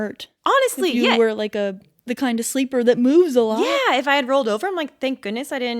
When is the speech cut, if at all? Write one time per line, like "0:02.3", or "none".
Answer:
0:01.9

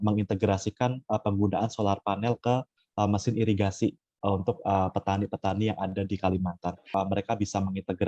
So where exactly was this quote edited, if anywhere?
0:06.8

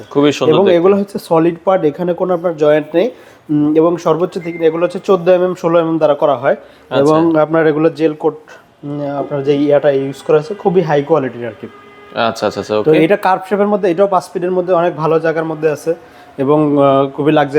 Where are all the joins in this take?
none

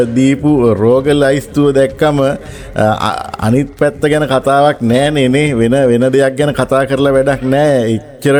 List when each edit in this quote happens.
none

